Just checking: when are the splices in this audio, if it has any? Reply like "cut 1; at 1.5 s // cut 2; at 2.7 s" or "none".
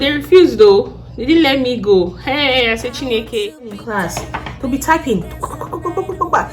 cut 1; at 3.8 s